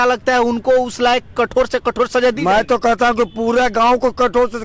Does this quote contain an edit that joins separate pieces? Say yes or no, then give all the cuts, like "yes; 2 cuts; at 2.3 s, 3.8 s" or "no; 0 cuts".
no; 0 cuts